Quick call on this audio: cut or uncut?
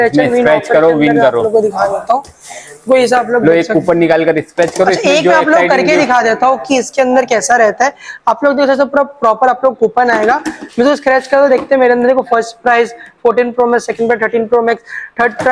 uncut